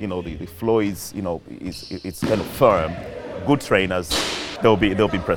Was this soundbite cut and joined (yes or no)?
yes